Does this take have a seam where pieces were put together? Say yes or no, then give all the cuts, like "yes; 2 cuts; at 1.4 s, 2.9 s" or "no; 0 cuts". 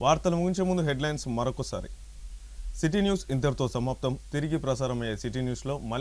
yes; 1 cut; at 2.4 s